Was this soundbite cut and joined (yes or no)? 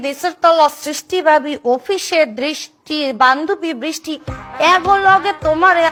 no